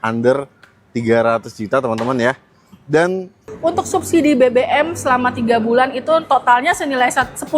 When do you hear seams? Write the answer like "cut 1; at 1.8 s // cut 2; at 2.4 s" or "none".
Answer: cut 1; at 3.4 s

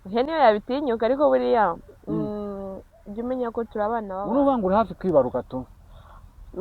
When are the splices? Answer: cut 1; at 4.2 s

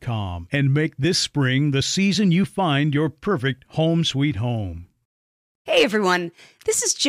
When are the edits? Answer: cut 1; at 5.5 s

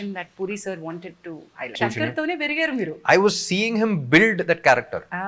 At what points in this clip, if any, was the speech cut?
cut 1; at 1.8 s

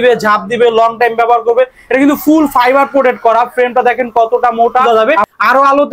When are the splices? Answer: cut 1; at 4.8 s

